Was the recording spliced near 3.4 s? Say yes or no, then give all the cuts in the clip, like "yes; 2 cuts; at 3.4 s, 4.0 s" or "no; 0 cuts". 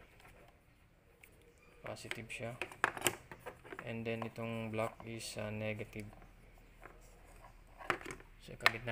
no; 1 cut; at 8.0 s